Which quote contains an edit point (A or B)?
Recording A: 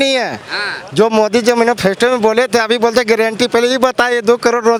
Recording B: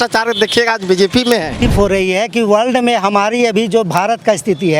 B